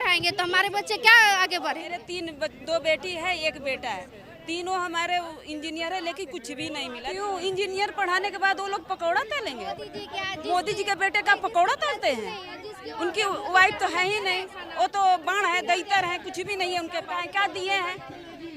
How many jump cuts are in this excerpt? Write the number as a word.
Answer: three